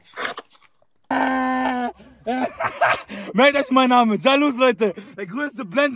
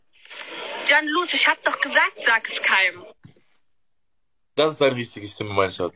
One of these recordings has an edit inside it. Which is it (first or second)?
first